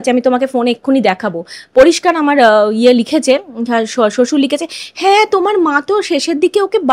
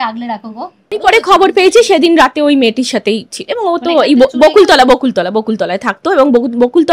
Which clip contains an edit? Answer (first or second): second